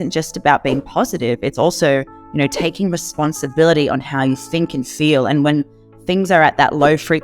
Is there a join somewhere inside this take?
no; 0 cuts

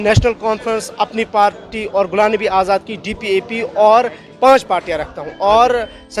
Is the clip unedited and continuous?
yes; 0 cuts

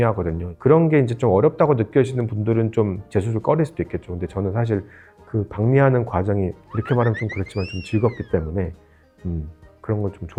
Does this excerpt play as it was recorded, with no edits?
yes; 0 cuts

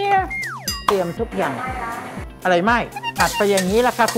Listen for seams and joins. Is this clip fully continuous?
no; 1 cut; at 3.0 s

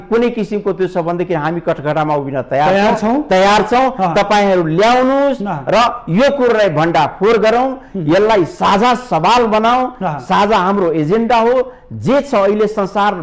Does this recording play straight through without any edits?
yes; 0 cuts

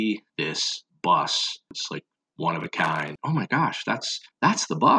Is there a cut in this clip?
yes; 2 cuts; at 1.7 s, 3.1 s

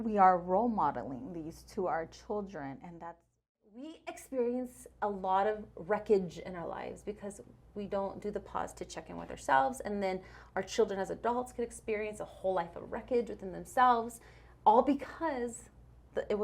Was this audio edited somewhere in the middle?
yes; 1 cut; at 3.8 s

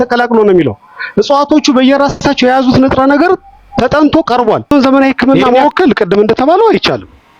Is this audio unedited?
no; 1 cut; at 4.7 s

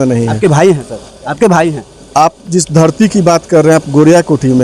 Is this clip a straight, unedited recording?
yes; 0 cuts

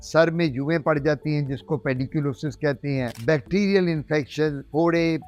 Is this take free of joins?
yes; 0 cuts

